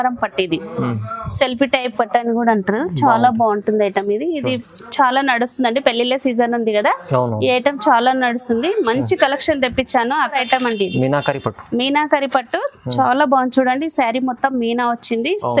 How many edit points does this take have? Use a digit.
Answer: 1